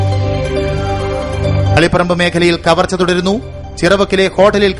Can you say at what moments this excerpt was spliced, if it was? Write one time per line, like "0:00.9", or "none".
0:01.8